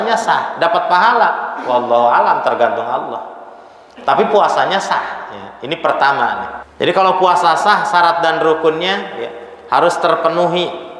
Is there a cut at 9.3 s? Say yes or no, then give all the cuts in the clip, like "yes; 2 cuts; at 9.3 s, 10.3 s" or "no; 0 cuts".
no; 1 cut; at 6.6 s